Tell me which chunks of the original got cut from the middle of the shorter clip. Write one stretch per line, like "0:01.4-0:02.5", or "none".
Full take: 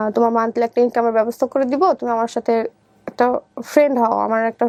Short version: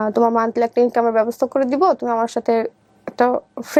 none